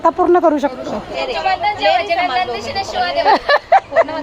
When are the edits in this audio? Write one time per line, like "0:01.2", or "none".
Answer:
0:01.1